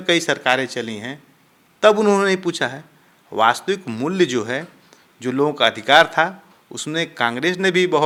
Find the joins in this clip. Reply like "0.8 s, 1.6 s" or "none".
none

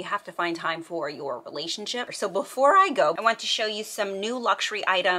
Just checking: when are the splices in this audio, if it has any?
2.1 s, 3.2 s

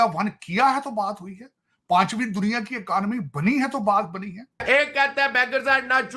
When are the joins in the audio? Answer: 4.6 s

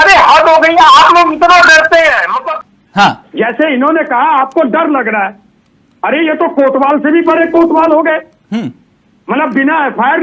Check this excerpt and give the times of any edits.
2.8 s

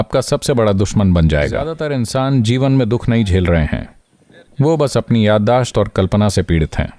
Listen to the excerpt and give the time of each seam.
1.8 s

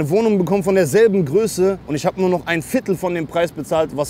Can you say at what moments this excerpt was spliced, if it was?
1.9 s

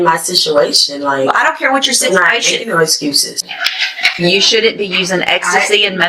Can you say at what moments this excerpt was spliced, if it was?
3.4 s

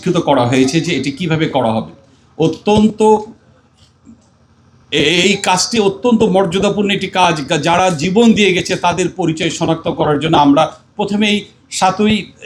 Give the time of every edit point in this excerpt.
none

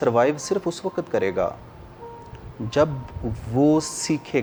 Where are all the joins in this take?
none

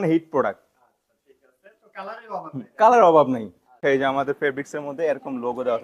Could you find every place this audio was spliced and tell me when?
3.8 s

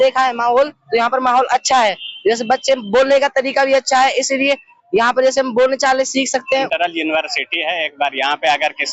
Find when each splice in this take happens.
6.4 s

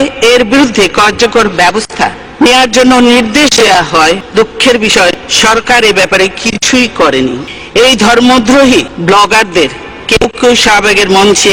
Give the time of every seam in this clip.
2.2 s, 4.2 s, 5.3 s, 7.5 s, 8.9 s

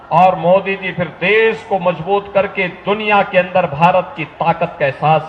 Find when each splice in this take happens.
none

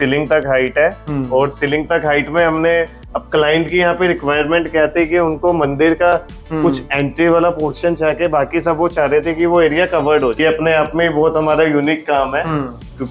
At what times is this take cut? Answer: 10.4 s

